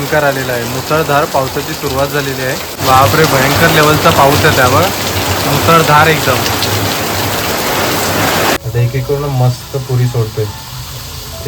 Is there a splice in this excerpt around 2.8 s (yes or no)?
yes